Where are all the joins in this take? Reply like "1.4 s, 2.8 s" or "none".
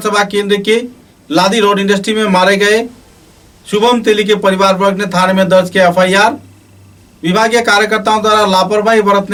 none